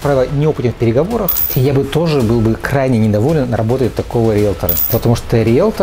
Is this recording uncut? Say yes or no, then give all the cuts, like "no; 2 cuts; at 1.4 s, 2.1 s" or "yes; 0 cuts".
no; 2 cuts; at 1.5 s, 4.7 s